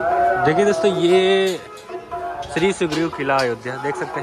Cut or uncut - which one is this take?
uncut